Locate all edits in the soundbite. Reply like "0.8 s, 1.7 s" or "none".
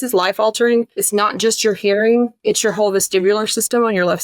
1.0 s, 2.4 s